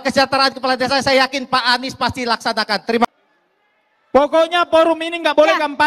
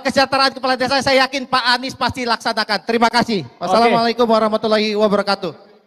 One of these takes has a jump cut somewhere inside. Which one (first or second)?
first